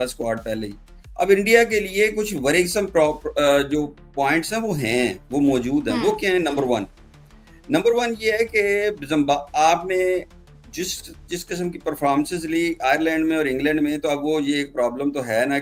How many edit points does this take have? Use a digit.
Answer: 0